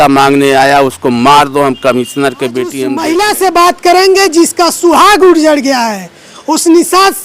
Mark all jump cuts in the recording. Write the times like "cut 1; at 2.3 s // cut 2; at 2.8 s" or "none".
cut 1; at 2.9 s

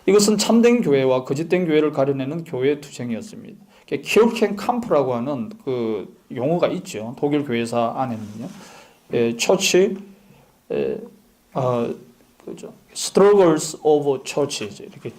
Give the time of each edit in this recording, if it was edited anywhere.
cut 1; at 9.3 s

